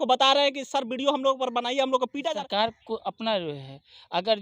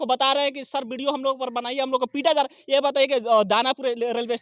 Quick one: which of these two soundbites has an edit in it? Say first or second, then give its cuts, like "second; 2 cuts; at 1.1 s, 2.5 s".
first; 1 cut; at 2.2 s